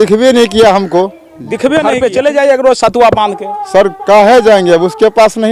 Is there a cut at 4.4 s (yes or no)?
no